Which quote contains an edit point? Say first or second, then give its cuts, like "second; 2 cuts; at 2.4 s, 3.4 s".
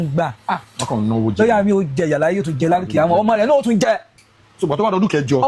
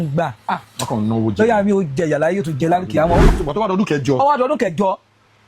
second; 1 cut; at 3.2 s